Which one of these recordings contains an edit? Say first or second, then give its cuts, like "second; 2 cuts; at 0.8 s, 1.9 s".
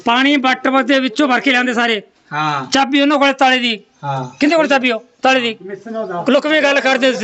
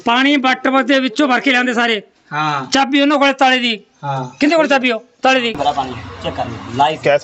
second; 1 cut; at 5.6 s